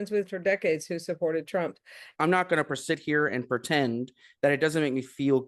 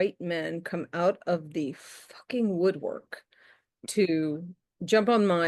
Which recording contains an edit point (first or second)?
first